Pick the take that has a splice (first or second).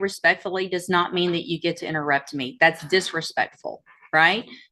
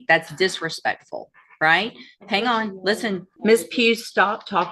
second